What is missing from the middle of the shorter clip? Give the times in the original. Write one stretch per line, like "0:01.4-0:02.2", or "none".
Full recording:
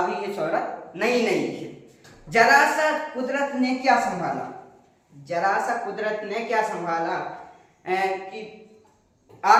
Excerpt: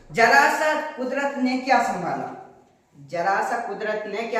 none

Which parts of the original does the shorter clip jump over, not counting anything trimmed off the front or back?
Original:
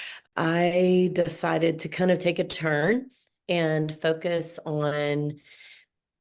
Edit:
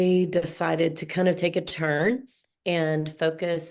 none

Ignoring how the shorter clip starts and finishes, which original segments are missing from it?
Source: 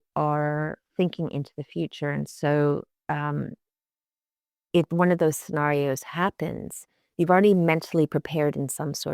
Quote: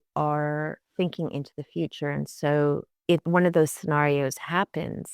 0:02.9-0:04.6

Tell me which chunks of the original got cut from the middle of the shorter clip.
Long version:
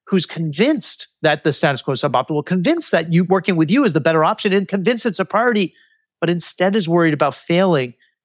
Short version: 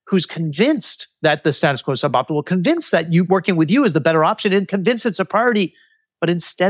none

